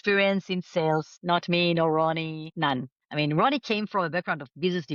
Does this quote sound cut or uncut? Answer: uncut